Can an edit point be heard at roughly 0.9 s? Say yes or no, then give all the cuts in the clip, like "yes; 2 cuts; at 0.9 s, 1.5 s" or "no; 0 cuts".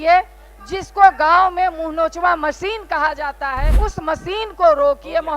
no; 1 cut; at 3.7 s